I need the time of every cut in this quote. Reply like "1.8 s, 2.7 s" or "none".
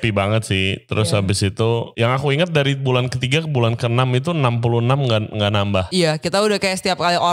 1.9 s, 5.9 s

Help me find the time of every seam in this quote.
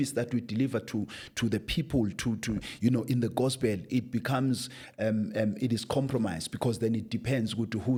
none

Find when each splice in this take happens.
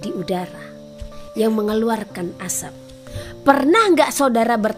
1.1 s, 3.1 s

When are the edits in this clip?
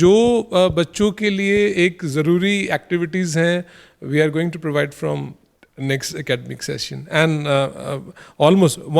none

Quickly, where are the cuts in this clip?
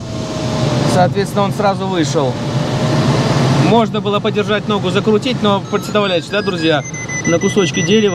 none

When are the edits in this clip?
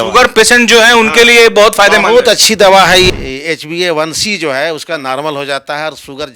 3.1 s

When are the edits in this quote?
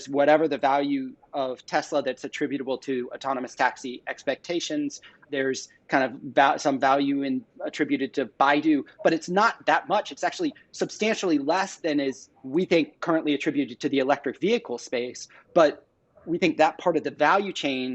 none

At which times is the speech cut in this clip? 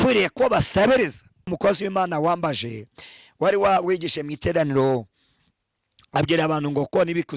1.4 s

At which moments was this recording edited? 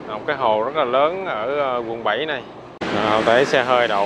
2.8 s

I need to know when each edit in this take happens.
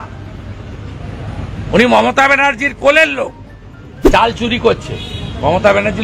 4.0 s

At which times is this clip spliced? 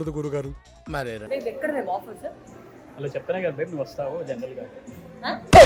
1.2 s

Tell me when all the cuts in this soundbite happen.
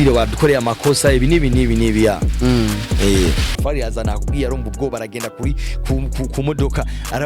3.5 s

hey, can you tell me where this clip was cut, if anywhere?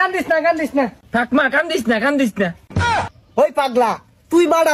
1.0 s, 3.1 s

